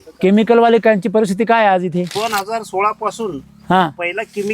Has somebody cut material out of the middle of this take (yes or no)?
yes